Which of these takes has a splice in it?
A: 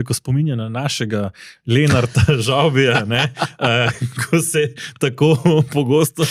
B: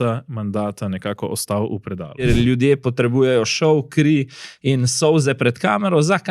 B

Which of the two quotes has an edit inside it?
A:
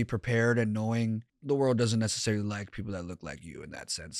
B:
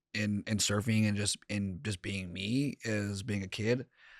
A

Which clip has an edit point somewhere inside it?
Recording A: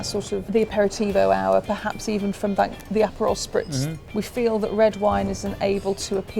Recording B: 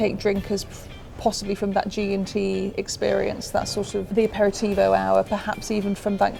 A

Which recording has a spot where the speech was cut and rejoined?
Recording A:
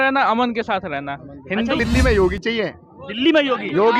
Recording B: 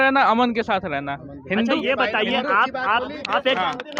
A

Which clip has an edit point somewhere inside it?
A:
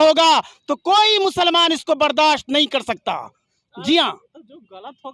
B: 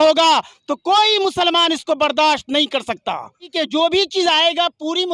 B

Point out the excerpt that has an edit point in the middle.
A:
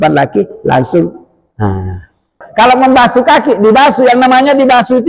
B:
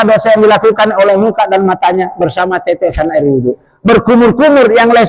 A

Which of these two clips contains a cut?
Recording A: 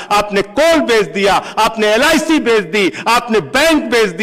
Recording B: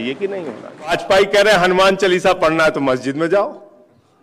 B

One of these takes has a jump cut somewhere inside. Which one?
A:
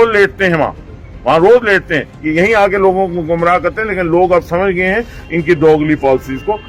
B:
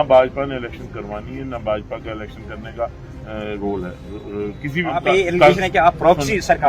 B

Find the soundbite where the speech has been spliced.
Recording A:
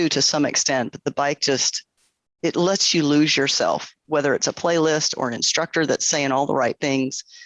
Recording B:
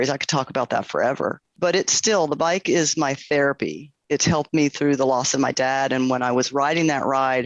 B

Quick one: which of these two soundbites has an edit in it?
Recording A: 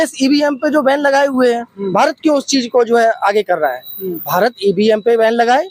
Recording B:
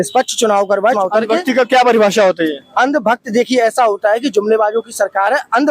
B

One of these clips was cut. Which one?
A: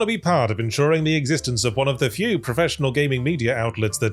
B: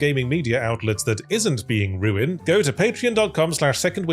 B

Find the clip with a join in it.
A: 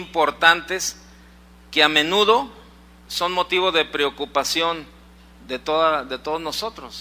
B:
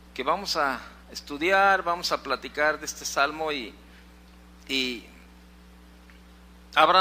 A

